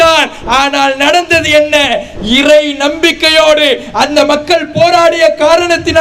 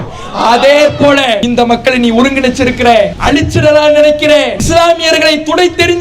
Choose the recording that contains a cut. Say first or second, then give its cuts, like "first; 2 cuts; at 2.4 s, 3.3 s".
second; 3 cuts; at 1.4 s, 3.2 s, 4.6 s